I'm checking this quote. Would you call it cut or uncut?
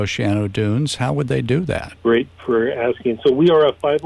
cut